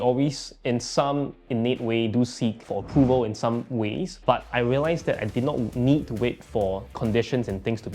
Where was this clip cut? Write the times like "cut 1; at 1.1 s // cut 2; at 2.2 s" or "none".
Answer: cut 1; at 2.6 s // cut 2; at 4.1 s